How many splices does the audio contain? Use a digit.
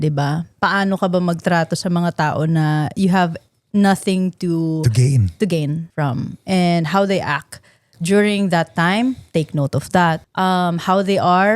2